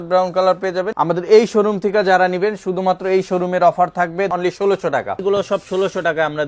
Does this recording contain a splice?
yes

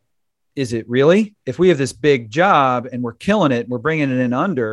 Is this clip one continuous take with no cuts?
no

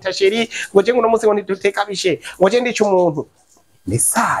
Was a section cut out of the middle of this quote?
no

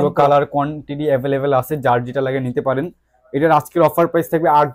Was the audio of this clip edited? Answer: no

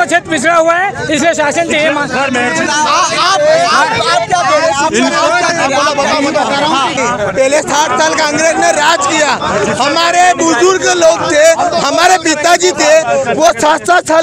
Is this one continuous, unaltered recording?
no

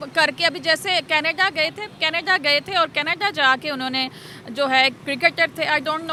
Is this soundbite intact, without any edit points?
yes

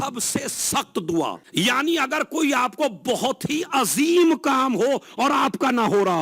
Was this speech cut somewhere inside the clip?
yes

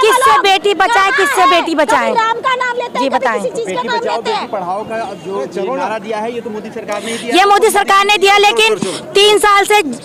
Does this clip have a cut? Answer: no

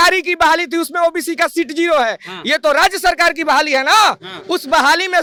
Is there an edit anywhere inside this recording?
no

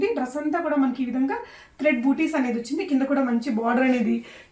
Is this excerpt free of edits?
yes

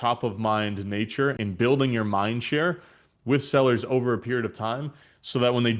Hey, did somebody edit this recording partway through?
yes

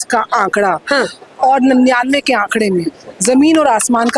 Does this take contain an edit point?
no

